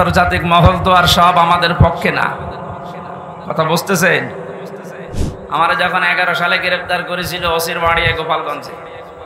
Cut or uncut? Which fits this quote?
cut